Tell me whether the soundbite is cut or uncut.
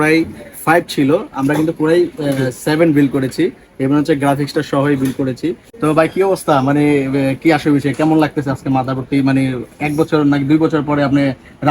cut